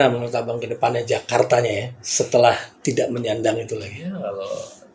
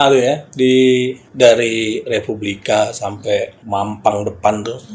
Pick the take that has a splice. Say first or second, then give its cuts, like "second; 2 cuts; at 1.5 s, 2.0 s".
second; 2 cuts; at 1.2 s, 3.6 s